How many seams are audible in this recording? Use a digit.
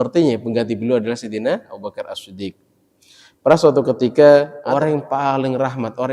1